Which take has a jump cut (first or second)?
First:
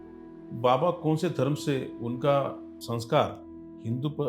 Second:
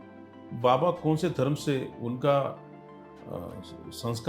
first